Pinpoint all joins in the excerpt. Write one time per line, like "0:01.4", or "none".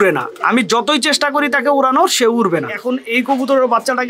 0:02.8